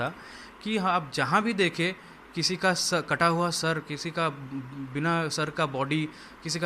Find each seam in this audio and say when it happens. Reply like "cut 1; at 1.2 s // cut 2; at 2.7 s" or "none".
none